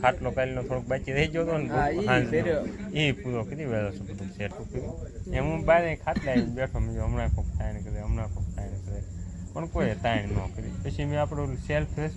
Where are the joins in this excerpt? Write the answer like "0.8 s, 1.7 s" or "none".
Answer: 4.5 s